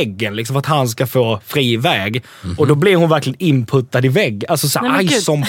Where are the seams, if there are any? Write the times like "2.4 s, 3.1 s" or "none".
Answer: none